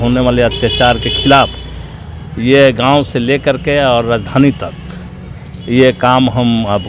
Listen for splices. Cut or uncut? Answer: uncut